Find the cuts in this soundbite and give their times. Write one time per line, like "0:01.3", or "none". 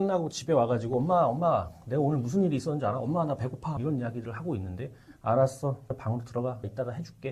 none